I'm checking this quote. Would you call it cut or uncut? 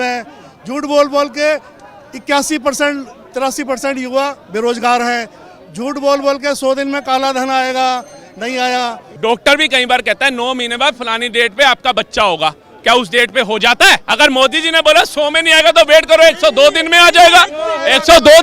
cut